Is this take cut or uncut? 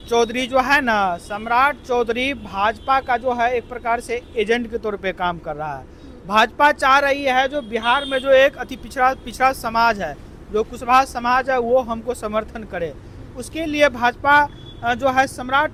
uncut